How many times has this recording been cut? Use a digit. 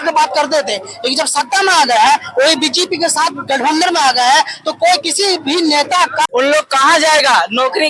1